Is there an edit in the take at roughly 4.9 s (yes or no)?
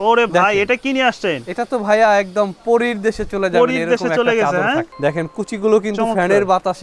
yes